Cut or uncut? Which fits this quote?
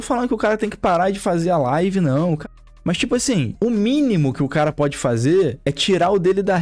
uncut